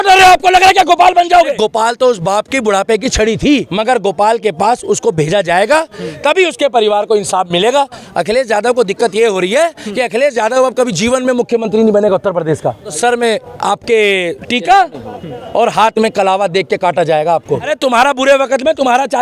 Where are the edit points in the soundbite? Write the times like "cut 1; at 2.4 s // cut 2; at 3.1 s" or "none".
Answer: cut 1; at 1.5 s // cut 2; at 3.7 s // cut 3; at 8.0 s // cut 4; at 13.0 s // cut 5; at 17.7 s

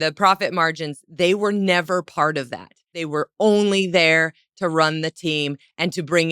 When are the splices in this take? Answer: cut 1; at 3.0 s

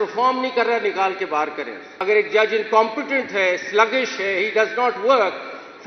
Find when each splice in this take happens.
cut 1; at 1.8 s

